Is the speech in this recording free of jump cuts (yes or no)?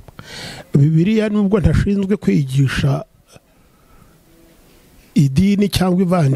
yes